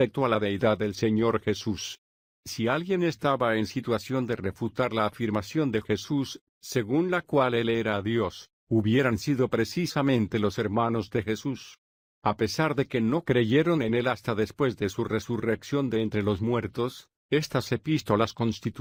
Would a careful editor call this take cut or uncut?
uncut